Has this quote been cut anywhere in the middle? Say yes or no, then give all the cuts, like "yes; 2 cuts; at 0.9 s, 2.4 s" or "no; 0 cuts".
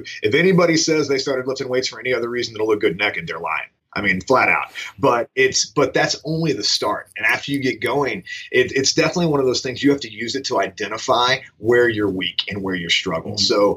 no; 0 cuts